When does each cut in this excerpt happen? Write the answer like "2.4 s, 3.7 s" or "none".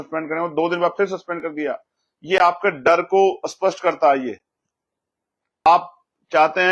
5.7 s